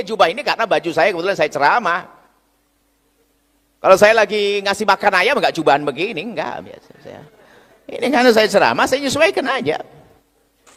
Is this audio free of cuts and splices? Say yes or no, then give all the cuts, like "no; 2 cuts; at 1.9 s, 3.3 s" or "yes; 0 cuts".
yes; 0 cuts